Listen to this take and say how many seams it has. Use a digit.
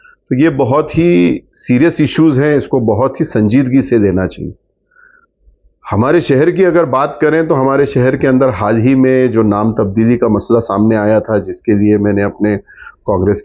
0